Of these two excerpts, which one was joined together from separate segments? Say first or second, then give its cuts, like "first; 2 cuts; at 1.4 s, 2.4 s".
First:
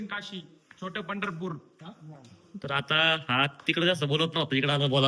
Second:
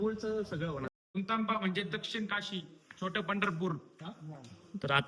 second; 1 cut; at 1.2 s